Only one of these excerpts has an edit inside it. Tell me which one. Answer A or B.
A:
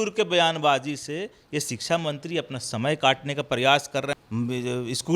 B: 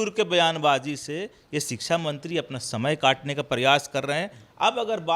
A